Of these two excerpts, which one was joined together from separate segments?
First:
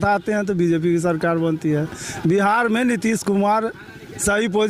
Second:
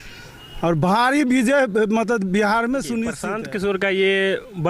second; 1 cut; at 3.2 s

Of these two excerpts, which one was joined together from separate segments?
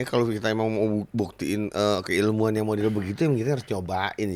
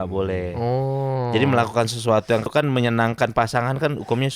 second; 1 cut; at 2.5 s

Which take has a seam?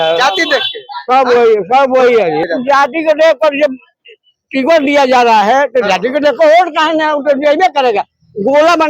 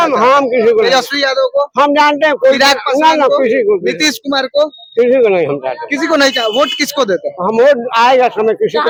first; 1 cut; at 2.5 s

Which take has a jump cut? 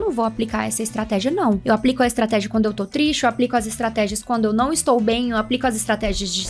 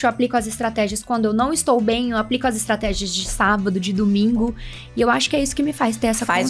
first; 1 cut; at 1.6 s

